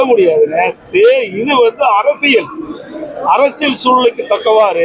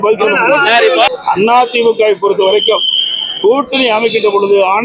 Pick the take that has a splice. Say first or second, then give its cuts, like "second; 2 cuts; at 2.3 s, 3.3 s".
second; 1 cut; at 1.1 s